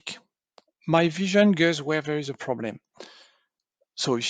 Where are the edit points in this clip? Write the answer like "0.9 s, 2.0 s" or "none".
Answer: none